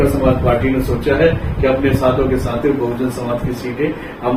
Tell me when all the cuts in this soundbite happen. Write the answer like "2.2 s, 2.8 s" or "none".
none